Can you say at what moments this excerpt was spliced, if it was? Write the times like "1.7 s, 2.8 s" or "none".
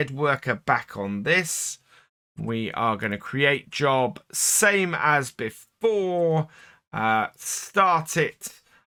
none